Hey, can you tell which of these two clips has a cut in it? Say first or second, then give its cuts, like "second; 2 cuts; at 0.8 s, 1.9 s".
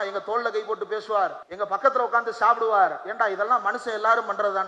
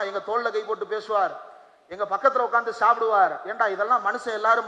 first; 1 cut; at 1.4 s